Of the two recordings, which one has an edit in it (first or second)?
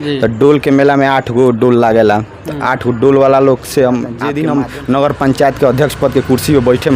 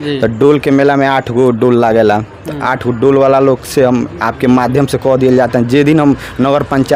first